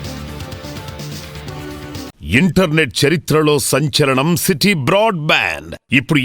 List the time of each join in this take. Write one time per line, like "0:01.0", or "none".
0:02.2

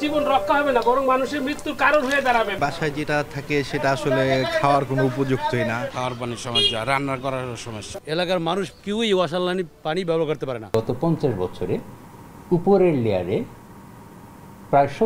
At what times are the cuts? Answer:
0:02.5
0:05.9
0:08.0
0:10.7

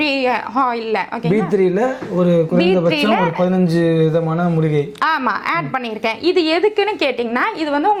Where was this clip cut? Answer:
none

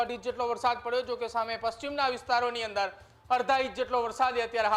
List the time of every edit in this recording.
none

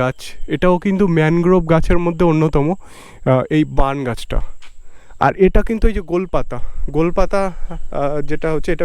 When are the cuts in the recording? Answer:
none

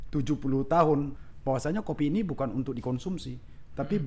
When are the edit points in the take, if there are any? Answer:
0:01.1

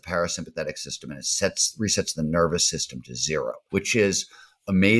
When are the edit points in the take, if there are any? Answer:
0:03.6

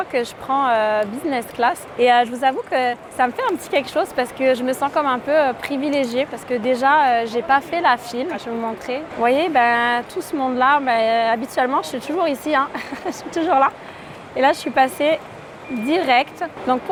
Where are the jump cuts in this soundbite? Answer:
none

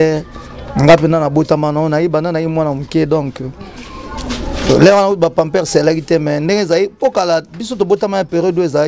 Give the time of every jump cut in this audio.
none

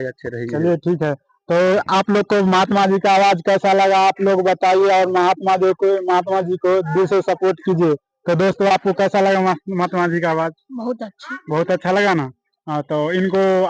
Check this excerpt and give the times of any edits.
none

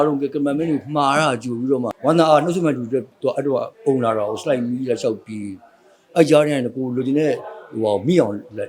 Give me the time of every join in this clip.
0:01.9

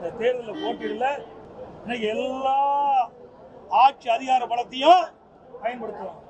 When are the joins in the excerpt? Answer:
0:01.4

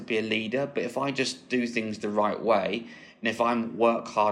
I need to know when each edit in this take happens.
none

